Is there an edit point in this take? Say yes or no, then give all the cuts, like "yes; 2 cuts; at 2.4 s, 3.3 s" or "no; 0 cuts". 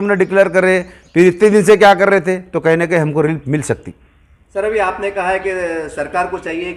no; 0 cuts